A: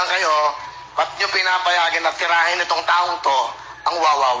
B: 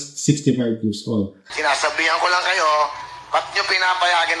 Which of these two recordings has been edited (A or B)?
B